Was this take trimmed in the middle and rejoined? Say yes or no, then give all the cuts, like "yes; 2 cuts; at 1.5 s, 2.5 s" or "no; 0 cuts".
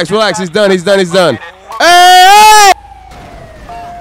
yes; 1 cut; at 2.7 s